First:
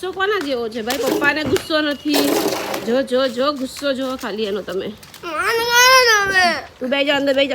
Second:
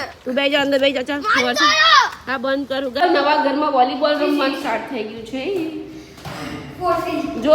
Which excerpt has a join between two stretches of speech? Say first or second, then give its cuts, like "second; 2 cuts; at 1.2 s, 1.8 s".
second; 1 cut; at 3.0 s